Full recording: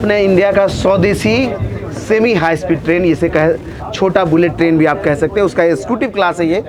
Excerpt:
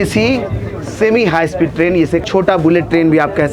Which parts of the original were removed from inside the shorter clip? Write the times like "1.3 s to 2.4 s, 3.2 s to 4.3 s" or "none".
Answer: 3.3 s to 3.9 s